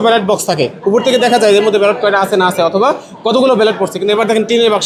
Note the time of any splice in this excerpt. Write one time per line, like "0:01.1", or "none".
none